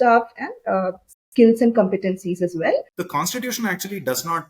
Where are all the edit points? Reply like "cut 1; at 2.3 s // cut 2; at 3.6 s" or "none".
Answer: cut 1; at 3.0 s